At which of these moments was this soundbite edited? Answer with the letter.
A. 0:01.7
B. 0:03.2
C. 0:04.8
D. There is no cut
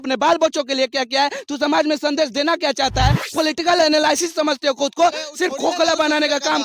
B